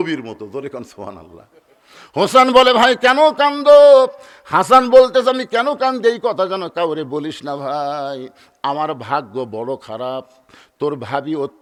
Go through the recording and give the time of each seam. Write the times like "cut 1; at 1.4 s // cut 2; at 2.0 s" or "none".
none